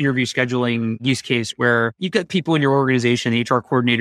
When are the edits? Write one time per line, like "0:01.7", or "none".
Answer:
0:01.0
0:02.0